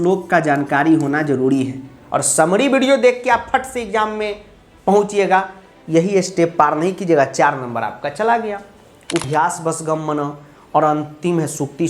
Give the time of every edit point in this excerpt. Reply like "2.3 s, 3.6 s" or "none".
9.2 s